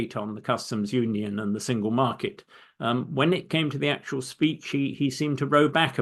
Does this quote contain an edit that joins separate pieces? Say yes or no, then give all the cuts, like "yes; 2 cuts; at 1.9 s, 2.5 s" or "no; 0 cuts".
no; 0 cuts